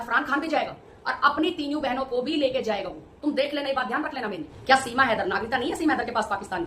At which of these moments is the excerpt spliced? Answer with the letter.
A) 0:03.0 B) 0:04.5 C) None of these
B